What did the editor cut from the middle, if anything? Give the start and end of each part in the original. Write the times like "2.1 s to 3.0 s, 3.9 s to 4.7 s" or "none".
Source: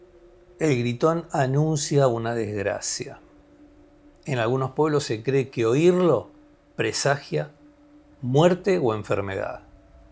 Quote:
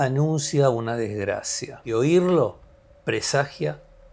3.2 s to 5.5 s